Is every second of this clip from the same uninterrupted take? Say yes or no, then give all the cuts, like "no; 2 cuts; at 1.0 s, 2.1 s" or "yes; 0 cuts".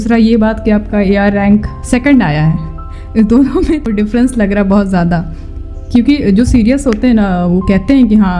no; 1 cut; at 3.9 s